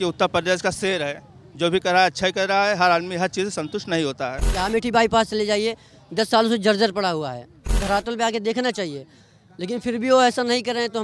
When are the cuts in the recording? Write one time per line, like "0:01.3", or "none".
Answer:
0:04.5
0:07.8